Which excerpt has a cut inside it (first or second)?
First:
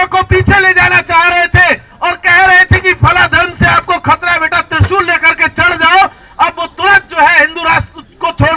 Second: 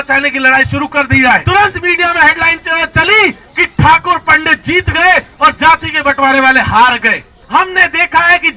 second